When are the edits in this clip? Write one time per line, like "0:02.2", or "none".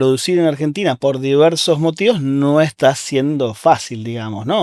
0:01.0
0:02.7